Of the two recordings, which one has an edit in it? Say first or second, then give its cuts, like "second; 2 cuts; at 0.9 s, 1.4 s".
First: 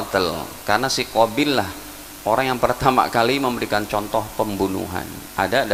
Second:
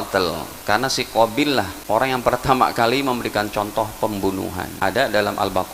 second; 2 cuts; at 1.8 s, 4.7 s